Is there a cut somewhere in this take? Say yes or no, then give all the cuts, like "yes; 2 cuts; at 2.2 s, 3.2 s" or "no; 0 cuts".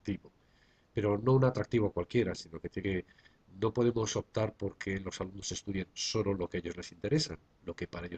no; 0 cuts